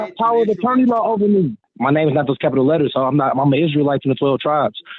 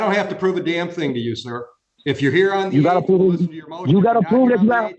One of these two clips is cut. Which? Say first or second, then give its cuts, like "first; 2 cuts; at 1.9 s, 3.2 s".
first; 1 cut; at 1.6 s